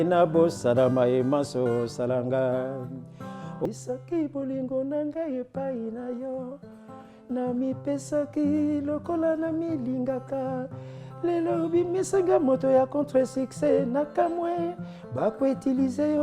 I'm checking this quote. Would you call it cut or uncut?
cut